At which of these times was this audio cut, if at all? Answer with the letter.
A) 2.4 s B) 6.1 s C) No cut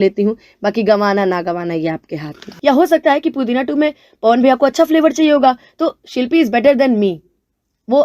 A